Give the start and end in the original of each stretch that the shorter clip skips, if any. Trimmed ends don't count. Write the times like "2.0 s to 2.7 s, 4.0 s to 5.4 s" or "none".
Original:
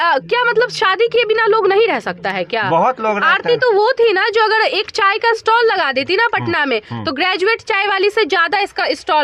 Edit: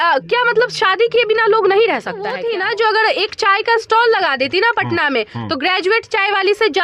2.4 s to 3.9 s